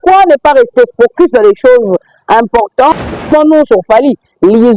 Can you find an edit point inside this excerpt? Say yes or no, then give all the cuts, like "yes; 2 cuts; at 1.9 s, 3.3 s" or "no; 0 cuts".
yes; 1 cut; at 3.3 s